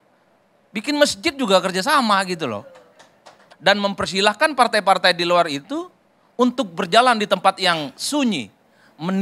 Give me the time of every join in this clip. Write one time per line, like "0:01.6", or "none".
0:03.4